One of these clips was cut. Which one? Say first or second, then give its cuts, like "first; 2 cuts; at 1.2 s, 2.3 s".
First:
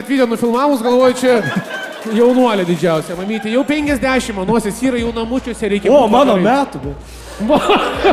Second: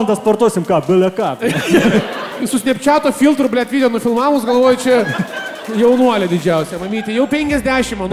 second; 1 cut; at 2.4 s